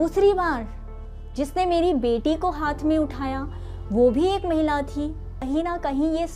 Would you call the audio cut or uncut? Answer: cut